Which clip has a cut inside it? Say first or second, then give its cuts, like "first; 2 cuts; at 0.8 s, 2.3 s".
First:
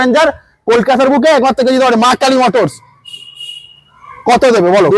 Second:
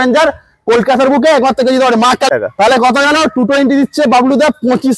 second; 1 cut; at 2.3 s